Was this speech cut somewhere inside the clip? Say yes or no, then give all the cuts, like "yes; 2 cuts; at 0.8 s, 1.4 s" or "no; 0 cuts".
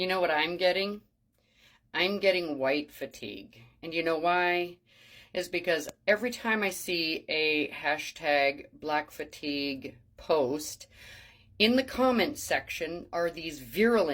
no; 0 cuts